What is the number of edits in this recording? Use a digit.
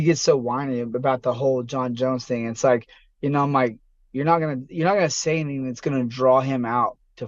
0